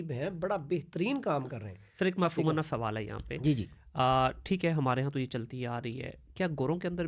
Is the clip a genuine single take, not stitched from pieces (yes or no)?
yes